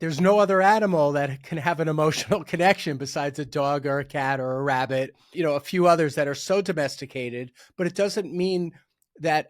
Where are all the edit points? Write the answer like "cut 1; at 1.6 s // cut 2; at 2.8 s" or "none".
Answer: cut 1; at 5.3 s // cut 2; at 7.6 s